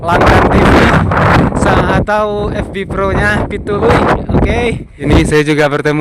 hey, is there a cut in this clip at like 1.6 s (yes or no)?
no